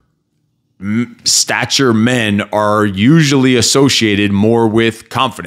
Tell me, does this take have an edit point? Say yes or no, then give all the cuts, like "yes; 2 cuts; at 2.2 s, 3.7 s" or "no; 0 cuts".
no; 0 cuts